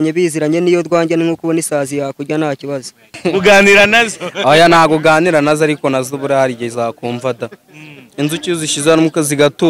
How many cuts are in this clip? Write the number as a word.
one